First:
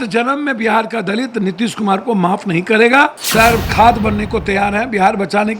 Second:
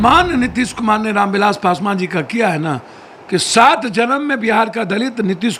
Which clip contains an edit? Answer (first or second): first